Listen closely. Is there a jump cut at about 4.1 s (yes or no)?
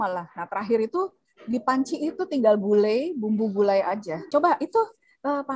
yes